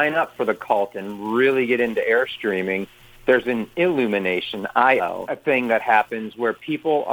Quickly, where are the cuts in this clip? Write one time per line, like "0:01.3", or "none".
none